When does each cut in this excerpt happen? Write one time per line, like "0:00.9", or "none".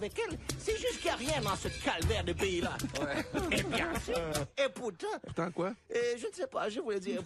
0:03.7